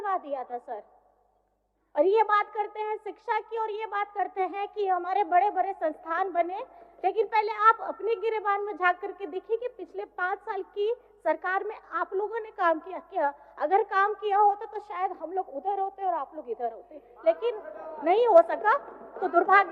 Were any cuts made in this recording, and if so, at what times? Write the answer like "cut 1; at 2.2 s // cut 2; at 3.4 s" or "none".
none

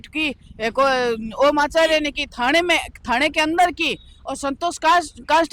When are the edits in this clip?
none

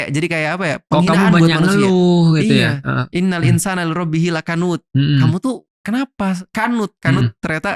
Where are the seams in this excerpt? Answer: none

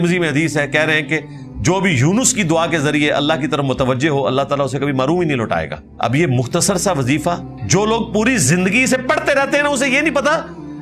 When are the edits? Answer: cut 1; at 5.8 s // cut 2; at 7.5 s

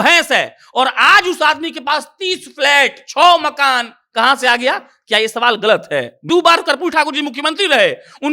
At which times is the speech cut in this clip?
cut 1; at 6.2 s

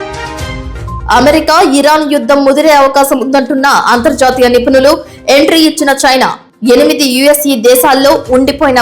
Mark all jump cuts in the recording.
cut 1; at 1.0 s

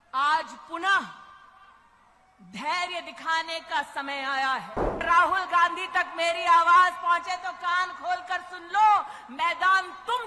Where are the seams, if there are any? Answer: cut 1; at 5.0 s

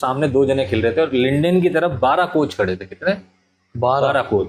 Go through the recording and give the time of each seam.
none

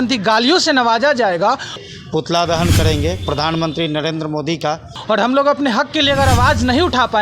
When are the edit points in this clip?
cut 1; at 1.8 s // cut 2; at 4.9 s

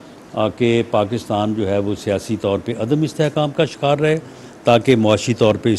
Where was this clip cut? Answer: cut 1; at 3.1 s

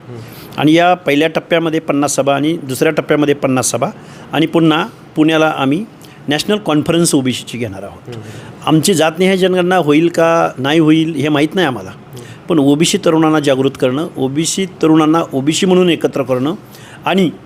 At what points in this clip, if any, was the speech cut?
none

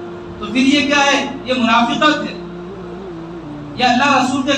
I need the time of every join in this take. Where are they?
cut 1; at 2.3 s // cut 2; at 3.7 s

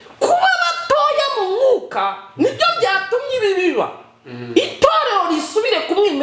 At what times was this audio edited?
none

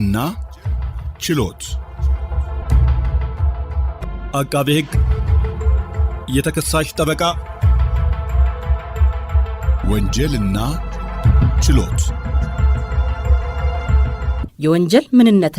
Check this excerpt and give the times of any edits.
cut 1; at 1.7 s

